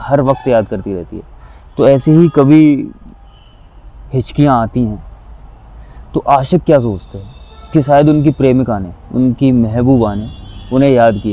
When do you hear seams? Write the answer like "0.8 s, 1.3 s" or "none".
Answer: none